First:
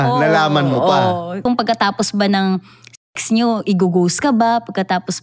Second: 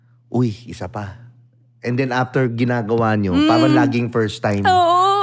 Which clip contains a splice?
first; 1 cut; at 1.4 s

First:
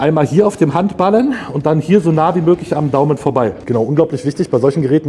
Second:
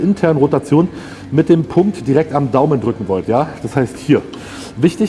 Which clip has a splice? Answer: first; 1 cut; at 3.6 s

